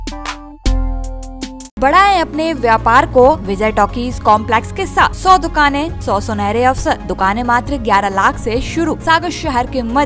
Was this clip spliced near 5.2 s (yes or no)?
yes